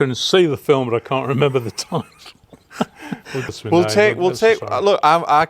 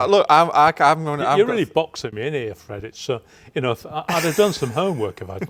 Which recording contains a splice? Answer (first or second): first